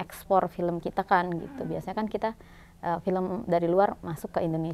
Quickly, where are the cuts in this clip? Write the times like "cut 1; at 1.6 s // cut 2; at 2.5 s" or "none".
none